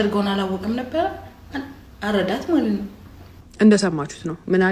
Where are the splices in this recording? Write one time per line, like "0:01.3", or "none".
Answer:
none